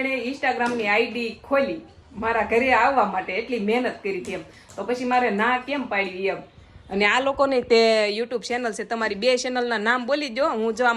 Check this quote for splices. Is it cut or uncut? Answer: uncut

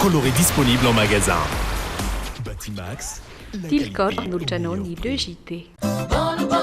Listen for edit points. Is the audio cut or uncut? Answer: cut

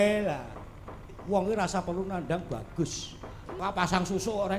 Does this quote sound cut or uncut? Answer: cut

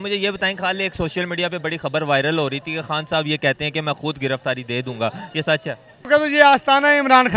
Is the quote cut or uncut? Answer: cut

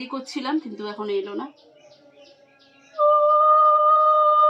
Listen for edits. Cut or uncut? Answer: uncut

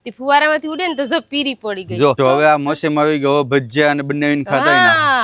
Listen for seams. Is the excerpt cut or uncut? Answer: cut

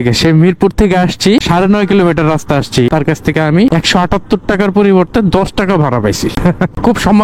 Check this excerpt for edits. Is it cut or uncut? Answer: cut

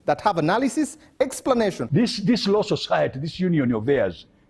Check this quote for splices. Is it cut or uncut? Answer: cut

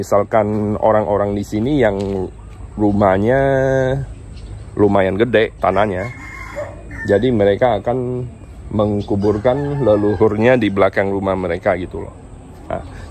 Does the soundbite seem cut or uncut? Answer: uncut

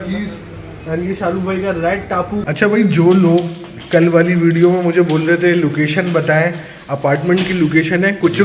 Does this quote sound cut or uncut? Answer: cut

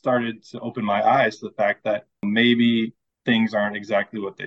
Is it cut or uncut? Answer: cut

